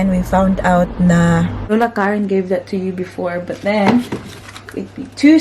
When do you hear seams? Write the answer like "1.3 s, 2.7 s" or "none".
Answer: 1.7 s